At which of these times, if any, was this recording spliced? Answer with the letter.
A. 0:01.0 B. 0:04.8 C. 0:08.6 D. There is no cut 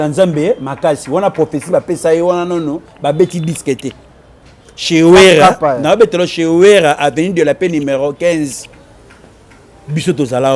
D